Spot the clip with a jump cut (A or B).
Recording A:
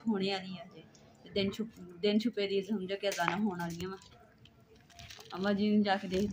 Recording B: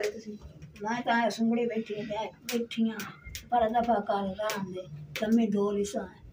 A